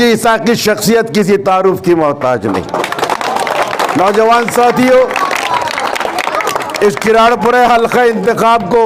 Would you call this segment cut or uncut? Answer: uncut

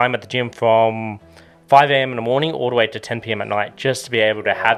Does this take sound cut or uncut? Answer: uncut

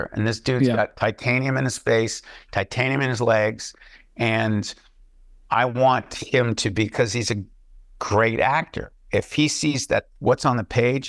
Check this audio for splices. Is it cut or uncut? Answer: uncut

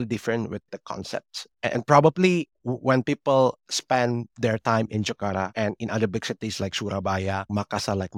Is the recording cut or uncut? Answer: uncut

